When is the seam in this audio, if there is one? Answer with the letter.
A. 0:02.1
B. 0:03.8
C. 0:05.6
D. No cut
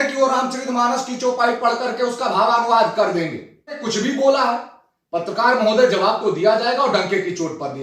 B